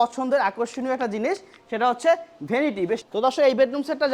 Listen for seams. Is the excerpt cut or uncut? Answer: cut